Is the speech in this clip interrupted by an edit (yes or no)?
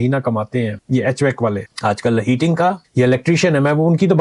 no